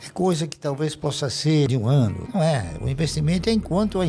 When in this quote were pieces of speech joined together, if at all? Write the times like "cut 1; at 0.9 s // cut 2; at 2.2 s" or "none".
cut 1; at 2.0 s